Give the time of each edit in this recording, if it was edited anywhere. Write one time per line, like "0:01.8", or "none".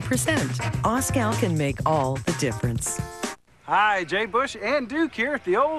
0:03.4